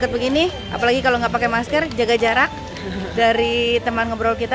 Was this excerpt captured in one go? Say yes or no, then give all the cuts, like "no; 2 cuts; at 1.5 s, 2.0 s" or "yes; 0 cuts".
yes; 0 cuts